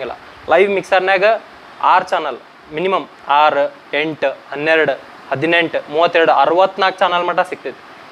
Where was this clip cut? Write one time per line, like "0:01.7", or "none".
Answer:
none